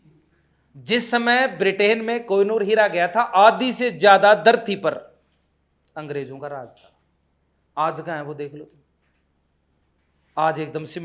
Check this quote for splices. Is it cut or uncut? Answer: uncut